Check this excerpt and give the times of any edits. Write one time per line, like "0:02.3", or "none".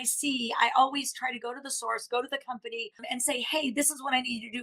0:03.1